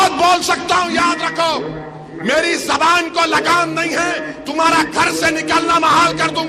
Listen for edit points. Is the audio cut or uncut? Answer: uncut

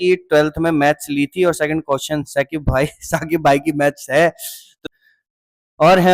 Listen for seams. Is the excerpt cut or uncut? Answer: cut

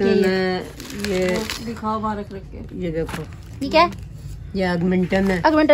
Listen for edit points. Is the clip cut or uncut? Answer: uncut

